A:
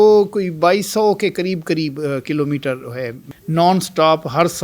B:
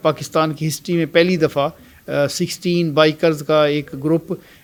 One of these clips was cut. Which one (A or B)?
A